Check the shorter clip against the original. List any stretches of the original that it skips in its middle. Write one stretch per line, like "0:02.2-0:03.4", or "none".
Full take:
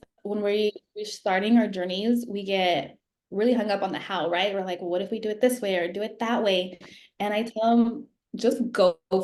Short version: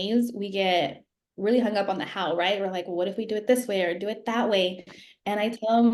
none